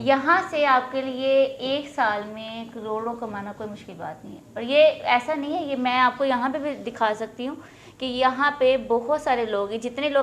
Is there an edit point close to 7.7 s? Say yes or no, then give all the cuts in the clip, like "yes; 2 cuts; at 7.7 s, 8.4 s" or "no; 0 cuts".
no; 0 cuts